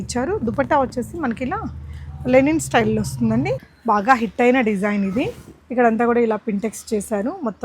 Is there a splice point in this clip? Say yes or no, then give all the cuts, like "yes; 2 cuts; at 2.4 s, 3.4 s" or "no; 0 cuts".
yes; 1 cut; at 3.7 s